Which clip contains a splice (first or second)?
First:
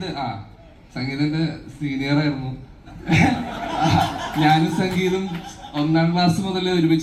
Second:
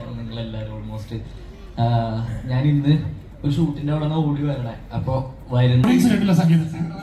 second